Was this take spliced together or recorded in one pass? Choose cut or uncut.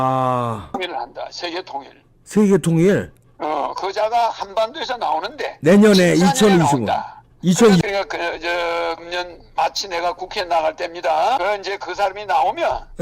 cut